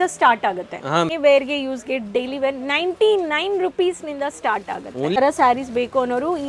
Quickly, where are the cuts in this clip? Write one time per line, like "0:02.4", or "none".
0:01.1
0:05.2

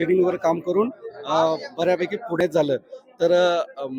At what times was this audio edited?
0:02.4

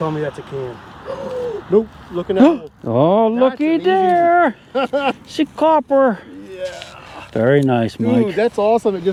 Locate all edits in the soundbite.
none

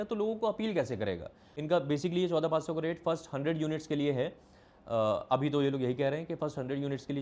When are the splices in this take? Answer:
0:01.5

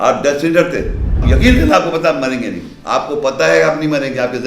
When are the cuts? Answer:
0:01.2

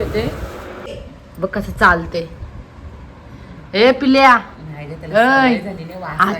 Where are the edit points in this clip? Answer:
0:01.0

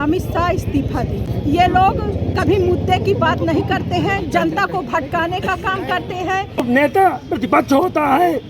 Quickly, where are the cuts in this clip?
0:01.3
0:06.6

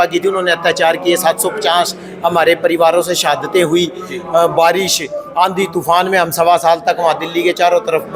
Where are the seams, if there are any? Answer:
none

